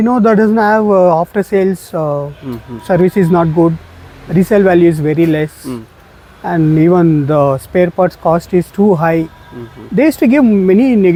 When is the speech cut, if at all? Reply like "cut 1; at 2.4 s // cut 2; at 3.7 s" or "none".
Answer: none